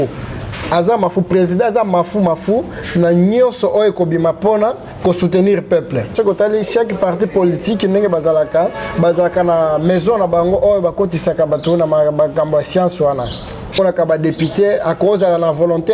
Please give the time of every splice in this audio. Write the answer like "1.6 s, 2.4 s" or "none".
6.1 s, 13.8 s